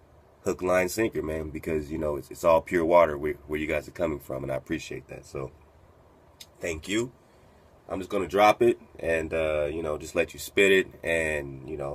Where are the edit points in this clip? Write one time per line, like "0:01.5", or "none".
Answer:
none

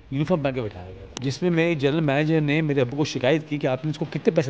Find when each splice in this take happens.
0:01.2

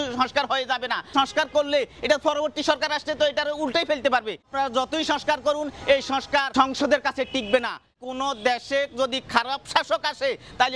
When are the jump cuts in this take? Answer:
0:01.1
0:04.5
0:06.5
0:07.9

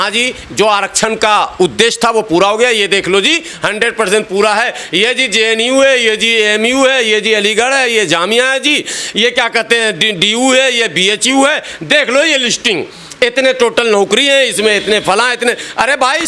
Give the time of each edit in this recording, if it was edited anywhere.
none

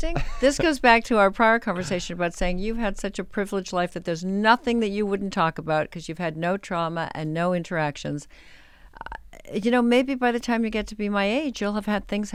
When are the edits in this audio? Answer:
none

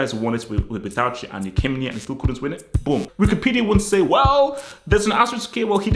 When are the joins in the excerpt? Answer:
0:03.1

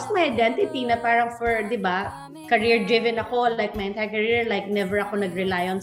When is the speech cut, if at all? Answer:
none

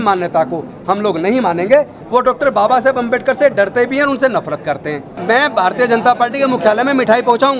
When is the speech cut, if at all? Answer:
0:02.0
0:05.1

